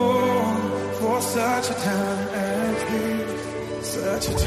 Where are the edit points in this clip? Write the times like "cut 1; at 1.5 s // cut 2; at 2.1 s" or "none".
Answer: none